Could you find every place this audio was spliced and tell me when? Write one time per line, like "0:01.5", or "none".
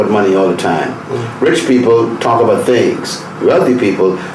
none